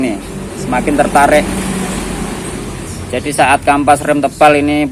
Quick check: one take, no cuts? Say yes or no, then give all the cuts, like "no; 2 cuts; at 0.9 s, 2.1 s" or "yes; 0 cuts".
yes; 0 cuts